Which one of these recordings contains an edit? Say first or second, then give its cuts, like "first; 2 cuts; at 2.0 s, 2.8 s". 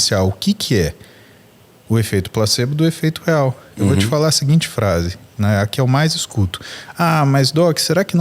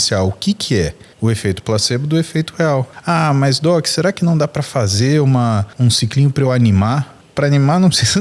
second; 4 cuts; at 1.0 s, 2.9 s, 5.7 s, 7.2 s